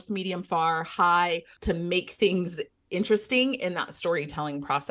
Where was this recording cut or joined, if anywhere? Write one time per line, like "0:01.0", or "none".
0:01.5